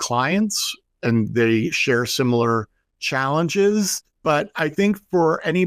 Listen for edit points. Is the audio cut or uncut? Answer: cut